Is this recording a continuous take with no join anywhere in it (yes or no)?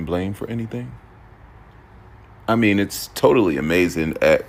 yes